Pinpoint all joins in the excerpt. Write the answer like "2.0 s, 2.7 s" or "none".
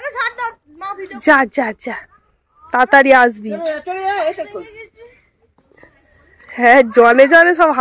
1.2 s